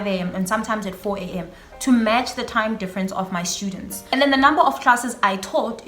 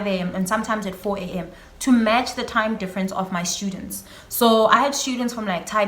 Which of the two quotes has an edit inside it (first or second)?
first